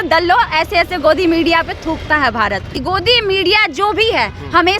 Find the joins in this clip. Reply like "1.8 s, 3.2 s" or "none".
2.7 s